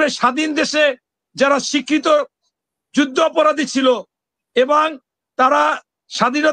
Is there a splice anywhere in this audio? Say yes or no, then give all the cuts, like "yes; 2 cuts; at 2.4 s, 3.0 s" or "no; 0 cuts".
no; 0 cuts